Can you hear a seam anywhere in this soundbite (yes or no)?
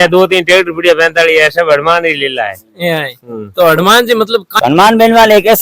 yes